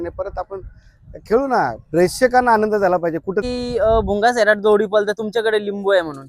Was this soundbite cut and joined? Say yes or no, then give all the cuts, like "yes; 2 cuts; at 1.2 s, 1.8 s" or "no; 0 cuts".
yes; 1 cut; at 3.4 s